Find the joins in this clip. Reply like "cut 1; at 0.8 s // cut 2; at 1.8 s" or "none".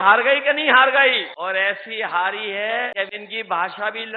cut 1; at 1.3 s // cut 2; at 2.9 s